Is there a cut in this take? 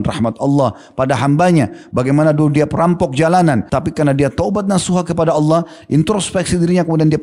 yes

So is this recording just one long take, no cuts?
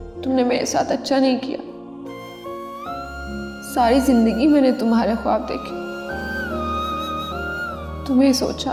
yes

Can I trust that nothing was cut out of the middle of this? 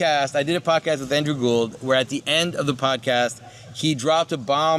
yes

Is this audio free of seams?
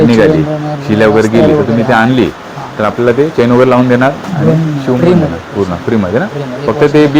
yes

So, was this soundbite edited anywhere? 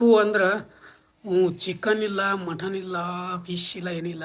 no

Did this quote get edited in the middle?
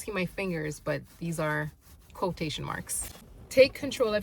no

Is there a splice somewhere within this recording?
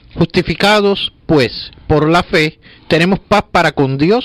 yes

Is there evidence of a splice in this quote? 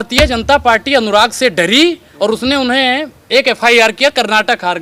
no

